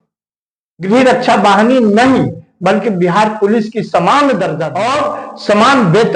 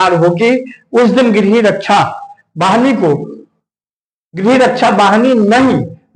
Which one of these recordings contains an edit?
first; 1 cut; at 4.6 s

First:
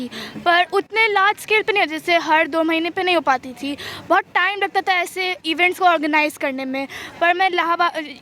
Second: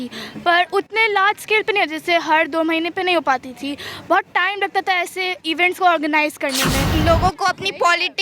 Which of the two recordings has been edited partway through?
second; 1 cut; at 6.9 s

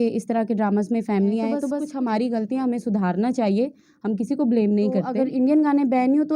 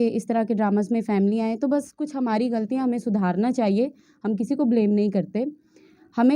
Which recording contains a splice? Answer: first; 2 cuts; at 1.8 s, 5.2 s

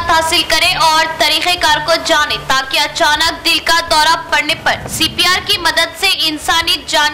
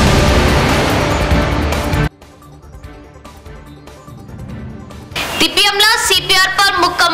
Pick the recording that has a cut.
second; 1 cut; at 2.0 s

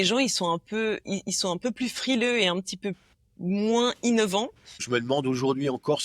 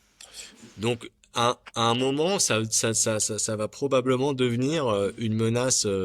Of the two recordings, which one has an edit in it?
first; 1 cut; at 4.8 s

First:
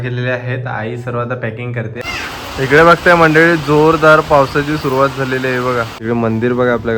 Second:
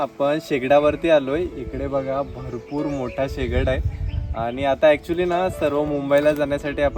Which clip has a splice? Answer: first; 2 cuts; at 1.9 s, 5.9 s

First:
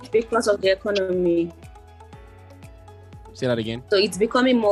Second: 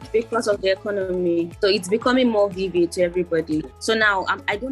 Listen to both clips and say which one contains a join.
second; 2 cuts; at 1.5 s, 3.7 s

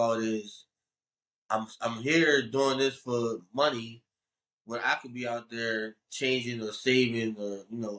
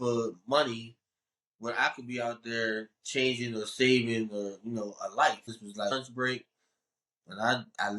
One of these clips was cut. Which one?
second; 1 cut; at 5.9 s

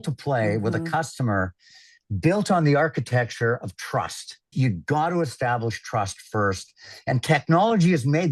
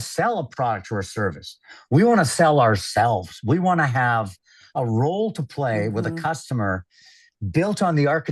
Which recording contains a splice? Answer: first; 1 cut; at 4.5 s

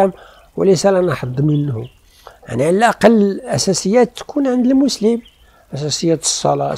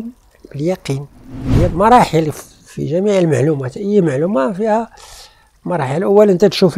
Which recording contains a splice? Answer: second; 1 cut; at 1.7 s

